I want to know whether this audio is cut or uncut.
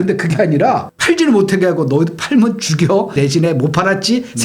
cut